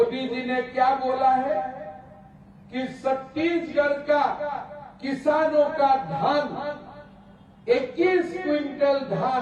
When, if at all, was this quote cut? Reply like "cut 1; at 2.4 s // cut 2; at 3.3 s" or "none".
none